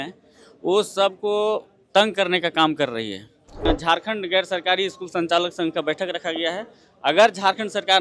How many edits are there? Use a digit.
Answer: 1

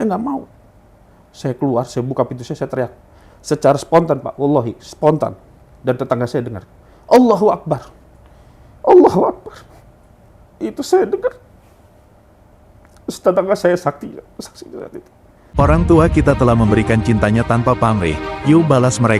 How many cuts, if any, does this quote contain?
1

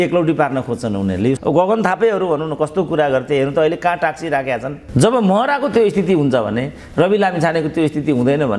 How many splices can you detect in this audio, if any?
2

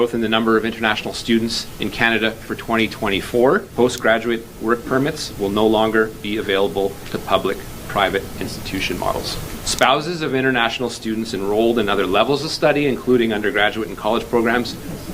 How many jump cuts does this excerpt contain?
2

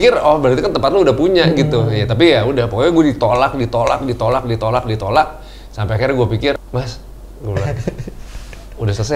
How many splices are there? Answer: 1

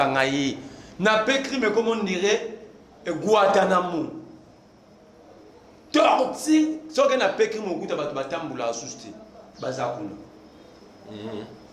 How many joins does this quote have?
0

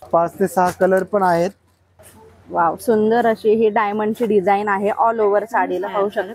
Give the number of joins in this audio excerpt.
1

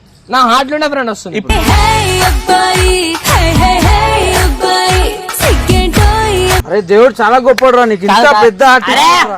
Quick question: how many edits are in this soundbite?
0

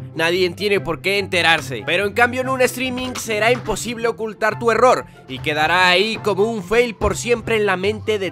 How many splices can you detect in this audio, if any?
1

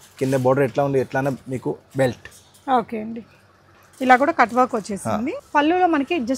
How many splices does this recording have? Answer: 1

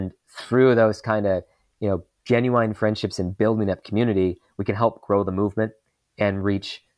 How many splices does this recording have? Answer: 0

